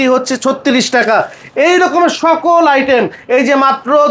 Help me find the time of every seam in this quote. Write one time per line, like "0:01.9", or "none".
none